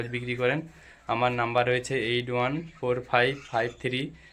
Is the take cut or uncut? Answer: uncut